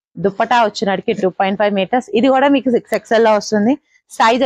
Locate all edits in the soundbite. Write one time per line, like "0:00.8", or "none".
none